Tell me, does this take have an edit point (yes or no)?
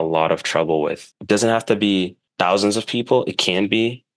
yes